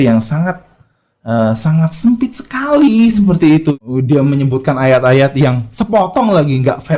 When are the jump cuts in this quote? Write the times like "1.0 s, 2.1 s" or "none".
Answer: 3.7 s